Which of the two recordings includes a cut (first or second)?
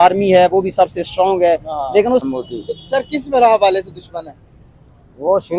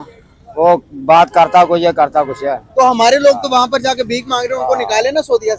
first